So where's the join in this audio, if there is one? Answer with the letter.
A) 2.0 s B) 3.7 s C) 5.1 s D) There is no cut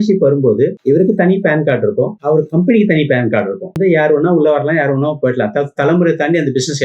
B